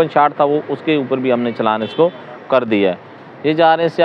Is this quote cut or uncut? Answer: uncut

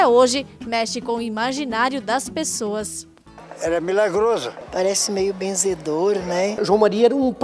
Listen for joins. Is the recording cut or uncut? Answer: cut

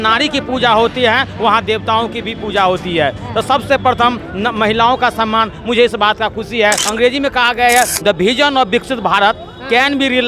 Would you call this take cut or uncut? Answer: cut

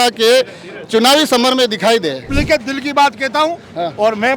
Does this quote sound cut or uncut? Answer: cut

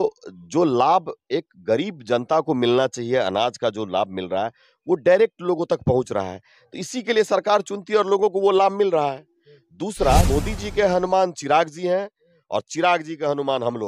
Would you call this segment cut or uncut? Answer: cut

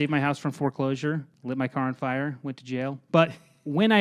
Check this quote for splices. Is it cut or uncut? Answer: cut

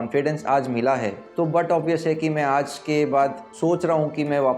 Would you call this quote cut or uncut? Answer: cut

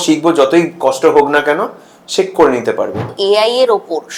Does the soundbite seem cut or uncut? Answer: cut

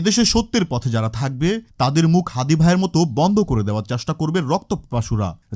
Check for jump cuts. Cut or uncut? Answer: uncut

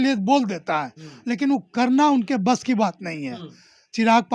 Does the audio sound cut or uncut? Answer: uncut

